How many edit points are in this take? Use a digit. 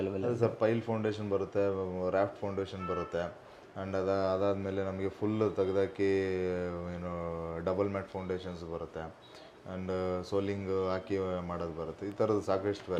0